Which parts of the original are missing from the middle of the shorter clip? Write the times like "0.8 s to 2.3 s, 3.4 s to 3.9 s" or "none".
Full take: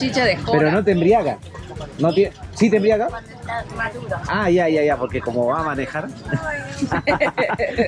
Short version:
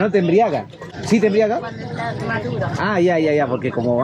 1.7 s to 2.4 s